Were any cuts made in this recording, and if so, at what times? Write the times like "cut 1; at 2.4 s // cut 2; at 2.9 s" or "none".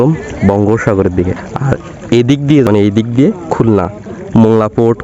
cut 1; at 1.5 s // cut 2; at 2.7 s